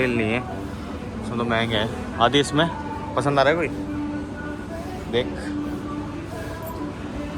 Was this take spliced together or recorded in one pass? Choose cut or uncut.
uncut